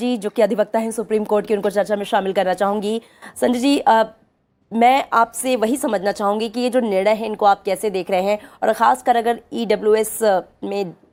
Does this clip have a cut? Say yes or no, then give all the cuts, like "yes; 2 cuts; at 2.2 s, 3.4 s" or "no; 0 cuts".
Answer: no; 0 cuts